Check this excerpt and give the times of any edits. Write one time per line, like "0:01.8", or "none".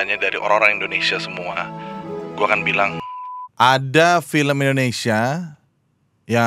0:02.9